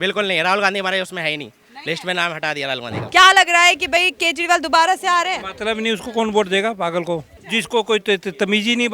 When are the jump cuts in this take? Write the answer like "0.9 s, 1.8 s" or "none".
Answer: 2.9 s, 7.4 s